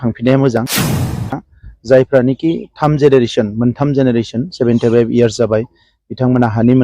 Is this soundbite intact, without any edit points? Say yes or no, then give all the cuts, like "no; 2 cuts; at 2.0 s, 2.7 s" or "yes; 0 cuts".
no; 1 cut; at 1.1 s